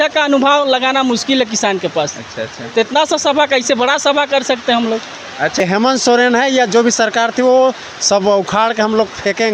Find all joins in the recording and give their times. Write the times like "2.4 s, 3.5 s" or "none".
5.6 s

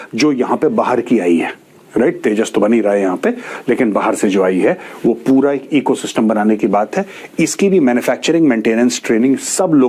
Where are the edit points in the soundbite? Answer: none

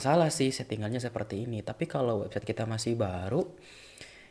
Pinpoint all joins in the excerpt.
none

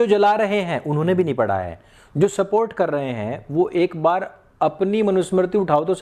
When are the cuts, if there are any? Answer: none

